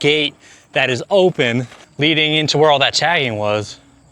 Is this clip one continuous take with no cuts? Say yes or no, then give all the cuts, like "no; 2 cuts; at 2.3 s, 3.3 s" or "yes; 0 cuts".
no; 1 cut; at 1.8 s